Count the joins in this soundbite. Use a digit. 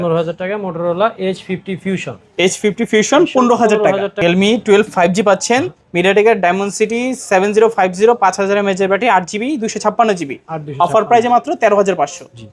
1